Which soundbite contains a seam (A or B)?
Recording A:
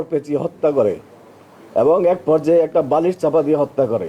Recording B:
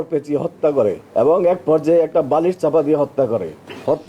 B